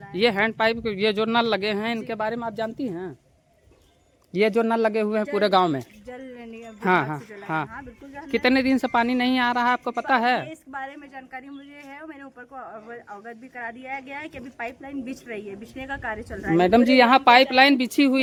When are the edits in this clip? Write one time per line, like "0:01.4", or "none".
none